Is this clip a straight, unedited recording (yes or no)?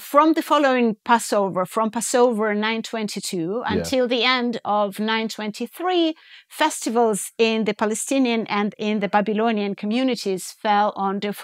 yes